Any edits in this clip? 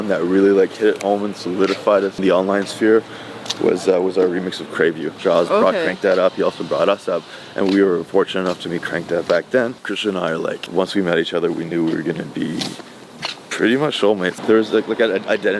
yes; 3 cuts; at 5.2 s, 9.9 s, 14.4 s

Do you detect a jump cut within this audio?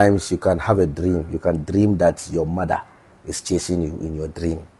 no; 0 cuts

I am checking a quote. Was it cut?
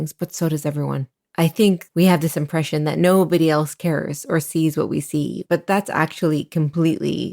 yes; 3 cuts; at 1.1 s, 1.9 s, 5.4 s

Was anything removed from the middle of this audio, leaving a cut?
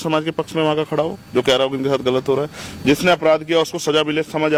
no; 0 cuts

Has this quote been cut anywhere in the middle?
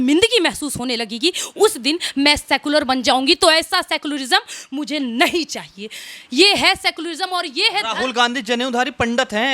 no; 0 cuts

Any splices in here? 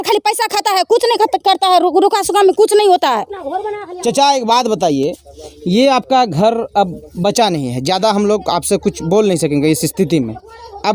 no; 0 cuts

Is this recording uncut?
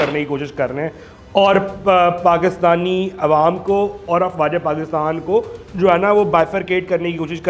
yes; 0 cuts

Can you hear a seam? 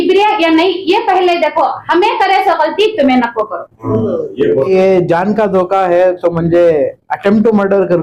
yes; 1 cut; at 4.7 s

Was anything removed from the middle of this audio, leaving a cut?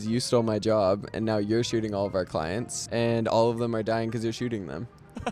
yes; 1 cut; at 2.8 s

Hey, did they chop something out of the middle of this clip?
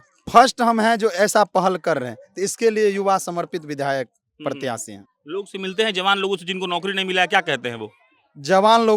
no; 0 cuts

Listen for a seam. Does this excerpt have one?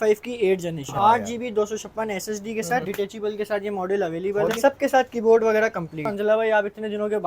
yes; 4 cuts; at 0.9 s, 2.9 s, 4.5 s, 6.1 s

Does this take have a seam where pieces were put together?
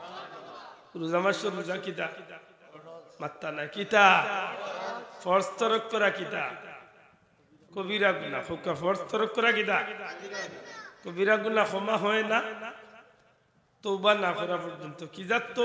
no; 0 cuts

